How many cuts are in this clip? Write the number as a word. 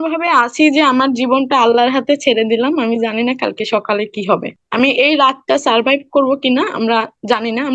one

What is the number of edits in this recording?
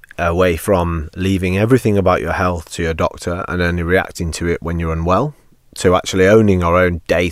zero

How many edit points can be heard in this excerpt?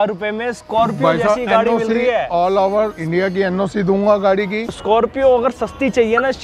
one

